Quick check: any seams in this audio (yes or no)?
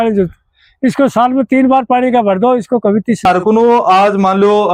yes